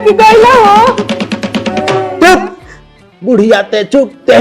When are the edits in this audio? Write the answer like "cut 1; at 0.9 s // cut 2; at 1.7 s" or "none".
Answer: cut 1; at 2.1 s